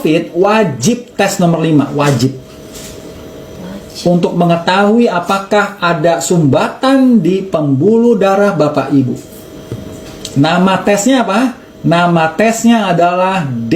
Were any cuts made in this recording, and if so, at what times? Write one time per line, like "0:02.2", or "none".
none